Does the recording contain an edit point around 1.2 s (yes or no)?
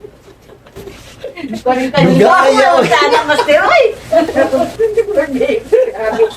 no